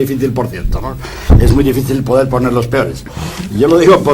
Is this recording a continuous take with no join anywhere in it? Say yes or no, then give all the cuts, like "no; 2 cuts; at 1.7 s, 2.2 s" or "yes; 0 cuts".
yes; 0 cuts